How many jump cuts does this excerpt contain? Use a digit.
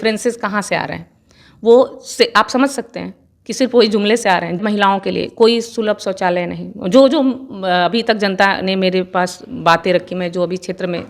1